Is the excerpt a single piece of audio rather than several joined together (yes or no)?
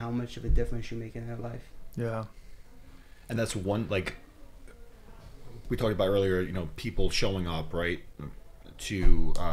yes